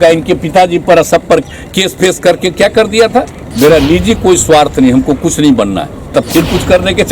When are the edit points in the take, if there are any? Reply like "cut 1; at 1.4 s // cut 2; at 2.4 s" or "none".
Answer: cut 1; at 3.4 s // cut 2; at 6.1 s